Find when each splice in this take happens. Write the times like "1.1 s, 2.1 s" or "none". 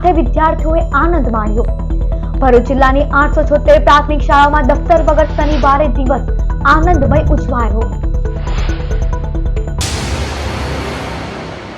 9.7 s